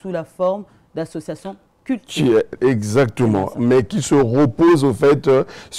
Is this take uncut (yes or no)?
yes